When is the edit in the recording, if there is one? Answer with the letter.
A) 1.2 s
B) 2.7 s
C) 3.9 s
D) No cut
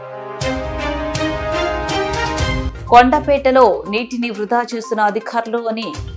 B